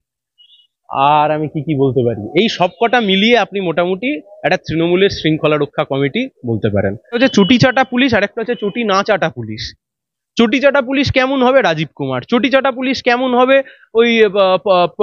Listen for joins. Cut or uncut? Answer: cut